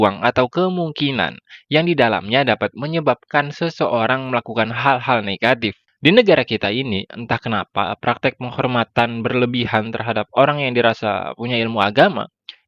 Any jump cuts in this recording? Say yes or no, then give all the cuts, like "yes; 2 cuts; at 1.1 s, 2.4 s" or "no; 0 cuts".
yes; 1 cut; at 5.8 s